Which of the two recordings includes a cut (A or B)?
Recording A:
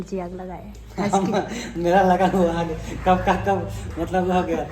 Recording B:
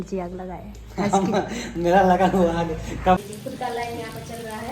B